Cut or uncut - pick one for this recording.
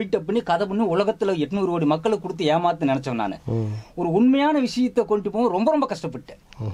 uncut